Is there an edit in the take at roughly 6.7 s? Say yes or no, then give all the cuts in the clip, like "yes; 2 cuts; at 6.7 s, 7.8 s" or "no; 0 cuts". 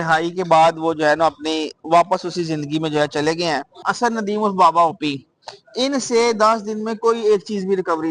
no; 1 cut; at 3.9 s